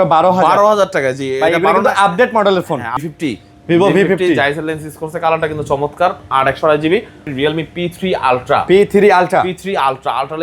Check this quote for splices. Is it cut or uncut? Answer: cut